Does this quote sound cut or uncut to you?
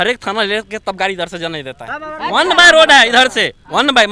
uncut